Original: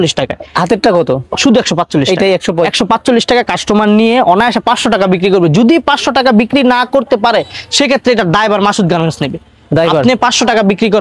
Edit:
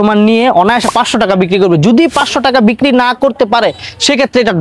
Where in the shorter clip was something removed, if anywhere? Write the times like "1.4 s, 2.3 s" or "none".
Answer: none